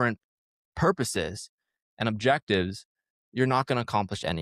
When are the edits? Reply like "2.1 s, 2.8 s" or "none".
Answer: none